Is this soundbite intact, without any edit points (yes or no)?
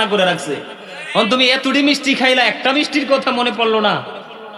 yes